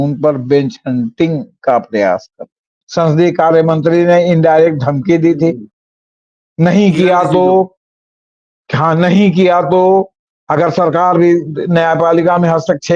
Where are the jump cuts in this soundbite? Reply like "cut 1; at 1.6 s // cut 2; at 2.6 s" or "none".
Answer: cut 1; at 2.8 s

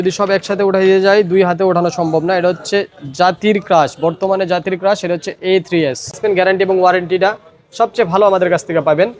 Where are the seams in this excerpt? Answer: cut 1; at 6.2 s

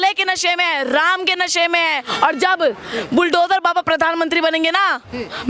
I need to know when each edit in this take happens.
cut 1; at 2.1 s

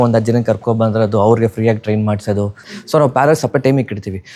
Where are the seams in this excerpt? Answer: cut 1; at 2.6 s

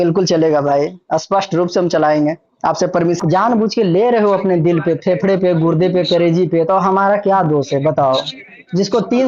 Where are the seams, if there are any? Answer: cut 1; at 3.2 s

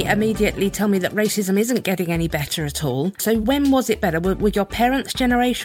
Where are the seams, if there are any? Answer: cut 1; at 3.2 s

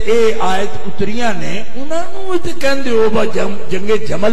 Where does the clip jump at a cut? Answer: none

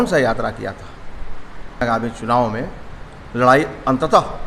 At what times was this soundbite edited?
cut 1; at 1.8 s

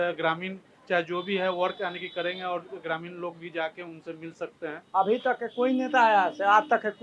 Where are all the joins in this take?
cut 1; at 4.7 s

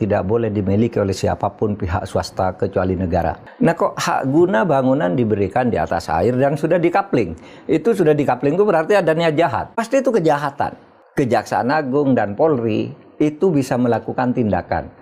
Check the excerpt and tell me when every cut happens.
cut 1; at 9.7 s

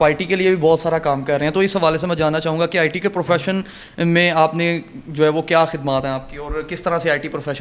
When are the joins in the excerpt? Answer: none

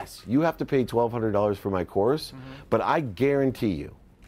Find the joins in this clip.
none

